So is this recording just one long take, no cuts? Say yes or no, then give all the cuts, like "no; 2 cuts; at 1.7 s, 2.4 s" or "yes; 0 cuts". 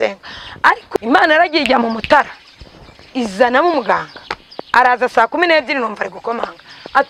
no; 1 cut; at 1.0 s